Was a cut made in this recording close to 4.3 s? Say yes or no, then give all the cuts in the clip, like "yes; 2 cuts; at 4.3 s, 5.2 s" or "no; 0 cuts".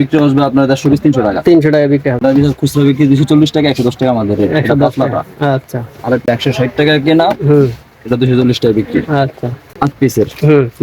no; 3 cuts; at 2.2 s, 6.3 s, 9.7 s